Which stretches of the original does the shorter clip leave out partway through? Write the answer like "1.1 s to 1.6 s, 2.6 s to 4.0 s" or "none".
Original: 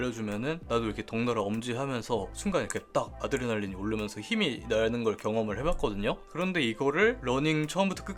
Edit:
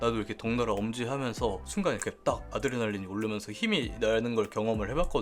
none